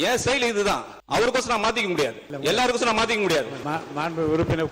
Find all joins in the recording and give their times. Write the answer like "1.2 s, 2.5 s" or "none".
0.9 s, 2.3 s, 3.6 s